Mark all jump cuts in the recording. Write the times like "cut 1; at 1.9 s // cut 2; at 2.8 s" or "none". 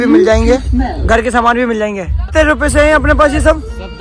cut 1; at 2.3 s